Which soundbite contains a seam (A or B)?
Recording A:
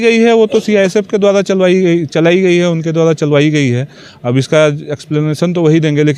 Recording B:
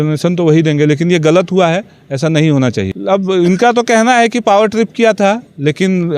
B